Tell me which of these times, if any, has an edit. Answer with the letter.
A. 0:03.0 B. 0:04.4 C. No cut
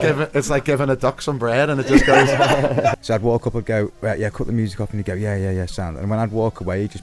A